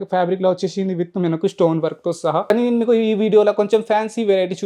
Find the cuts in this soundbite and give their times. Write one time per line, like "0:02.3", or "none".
0:02.5